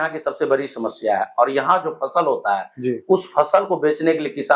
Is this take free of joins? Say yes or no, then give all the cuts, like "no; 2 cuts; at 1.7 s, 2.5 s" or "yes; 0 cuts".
yes; 0 cuts